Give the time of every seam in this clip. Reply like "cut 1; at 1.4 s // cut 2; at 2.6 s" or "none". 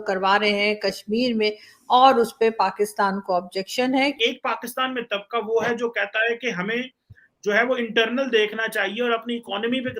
cut 1; at 4.2 s